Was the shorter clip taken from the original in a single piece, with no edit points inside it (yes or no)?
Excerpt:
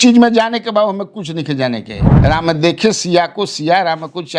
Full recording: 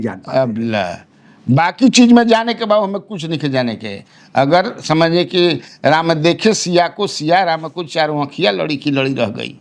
no